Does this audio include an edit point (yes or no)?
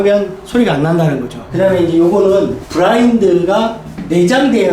yes